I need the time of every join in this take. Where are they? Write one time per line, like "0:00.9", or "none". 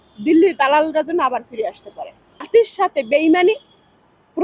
0:02.5